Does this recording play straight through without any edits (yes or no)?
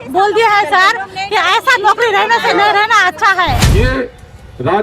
no